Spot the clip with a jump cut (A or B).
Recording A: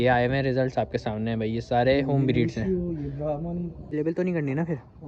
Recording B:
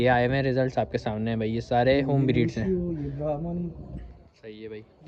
A